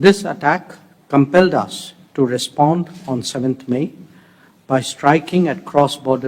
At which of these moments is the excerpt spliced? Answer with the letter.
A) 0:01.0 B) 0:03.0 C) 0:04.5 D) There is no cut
D